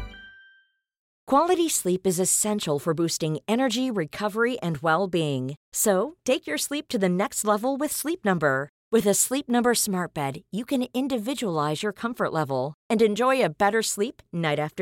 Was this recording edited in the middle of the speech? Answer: yes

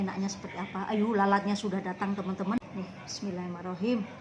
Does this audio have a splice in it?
yes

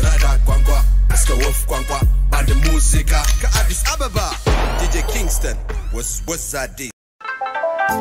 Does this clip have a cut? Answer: yes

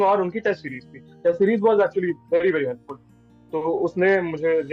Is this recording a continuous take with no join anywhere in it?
yes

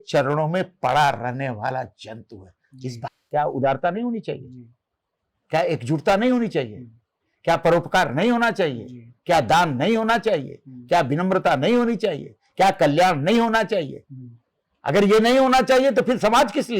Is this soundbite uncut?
no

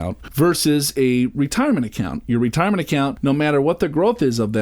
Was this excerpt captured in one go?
no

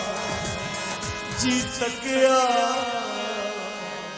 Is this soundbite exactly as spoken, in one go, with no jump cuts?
yes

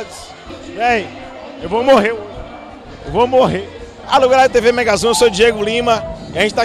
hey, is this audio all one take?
no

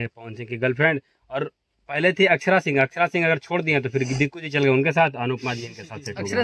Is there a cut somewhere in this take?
no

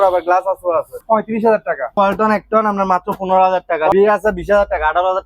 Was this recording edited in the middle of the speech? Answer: yes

